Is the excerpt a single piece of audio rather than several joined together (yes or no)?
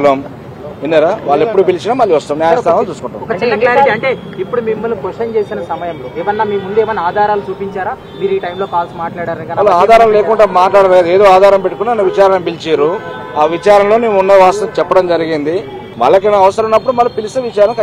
no